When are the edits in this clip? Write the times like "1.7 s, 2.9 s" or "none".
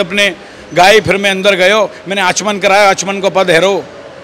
none